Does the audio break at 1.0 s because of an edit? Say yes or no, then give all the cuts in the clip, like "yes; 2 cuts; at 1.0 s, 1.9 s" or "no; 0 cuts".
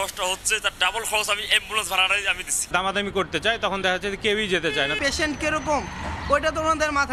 no; 2 cuts; at 2.6 s, 5.0 s